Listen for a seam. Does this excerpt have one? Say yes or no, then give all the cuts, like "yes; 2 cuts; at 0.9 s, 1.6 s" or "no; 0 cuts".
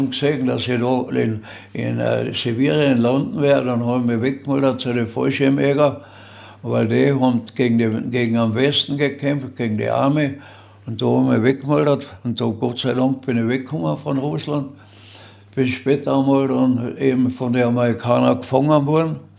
no; 0 cuts